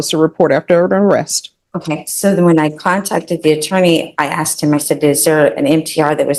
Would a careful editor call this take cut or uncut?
uncut